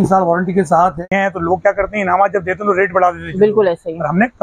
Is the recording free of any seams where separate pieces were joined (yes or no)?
no